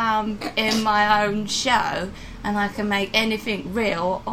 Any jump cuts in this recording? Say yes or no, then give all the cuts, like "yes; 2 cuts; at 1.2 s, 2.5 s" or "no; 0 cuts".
no; 0 cuts